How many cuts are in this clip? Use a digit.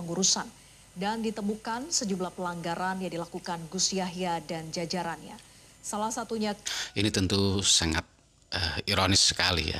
1